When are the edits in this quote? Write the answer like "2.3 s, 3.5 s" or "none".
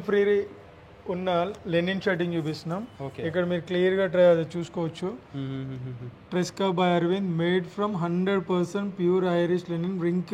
none